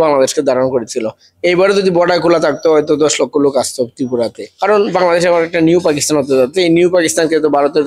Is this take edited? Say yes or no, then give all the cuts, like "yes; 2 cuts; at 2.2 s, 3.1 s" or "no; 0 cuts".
yes; 1 cut; at 4.5 s